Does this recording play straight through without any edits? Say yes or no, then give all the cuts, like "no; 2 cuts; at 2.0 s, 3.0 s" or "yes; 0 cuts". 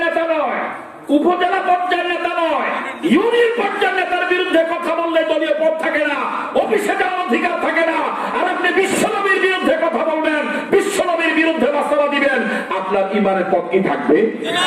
yes; 0 cuts